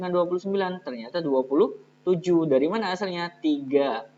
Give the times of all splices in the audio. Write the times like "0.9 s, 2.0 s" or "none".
none